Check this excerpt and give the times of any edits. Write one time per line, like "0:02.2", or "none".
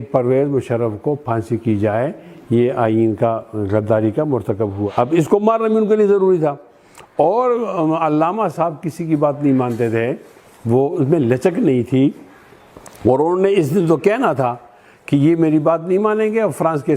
0:04.8